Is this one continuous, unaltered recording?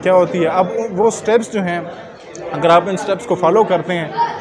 yes; 0 cuts

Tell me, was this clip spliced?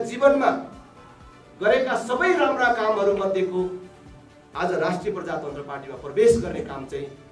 no; 0 cuts

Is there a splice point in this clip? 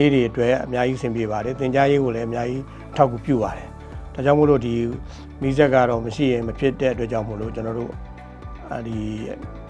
no; 0 cuts

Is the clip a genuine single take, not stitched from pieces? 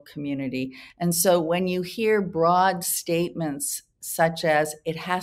yes; 0 cuts

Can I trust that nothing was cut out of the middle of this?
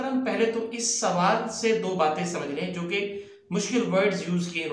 yes; 0 cuts

